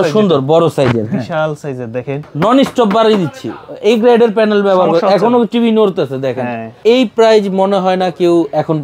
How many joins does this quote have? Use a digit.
2